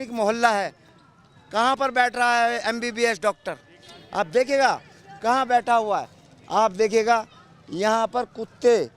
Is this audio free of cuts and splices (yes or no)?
yes